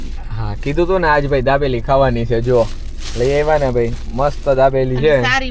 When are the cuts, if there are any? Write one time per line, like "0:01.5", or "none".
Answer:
none